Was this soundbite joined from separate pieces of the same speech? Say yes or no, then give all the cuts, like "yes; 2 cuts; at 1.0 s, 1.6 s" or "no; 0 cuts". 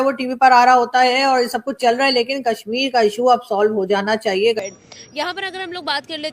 yes; 1 cut; at 4.6 s